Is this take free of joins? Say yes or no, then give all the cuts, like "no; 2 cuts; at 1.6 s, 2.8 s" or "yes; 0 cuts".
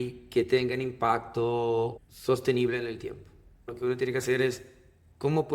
no; 2 cuts; at 2.1 s, 3.7 s